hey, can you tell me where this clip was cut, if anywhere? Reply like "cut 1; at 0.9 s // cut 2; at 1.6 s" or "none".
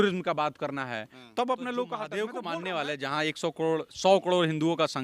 cut 1; at 2.3 s